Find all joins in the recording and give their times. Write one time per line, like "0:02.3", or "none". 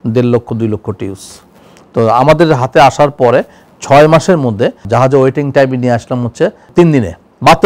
0:04.8
0:06.6